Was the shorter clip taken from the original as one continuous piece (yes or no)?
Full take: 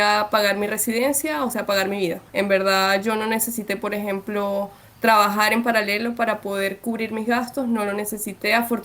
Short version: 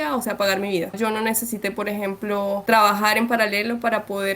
no